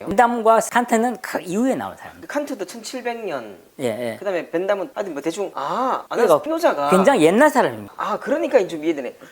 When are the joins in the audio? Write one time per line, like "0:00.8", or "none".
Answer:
0:02.1
0:07.9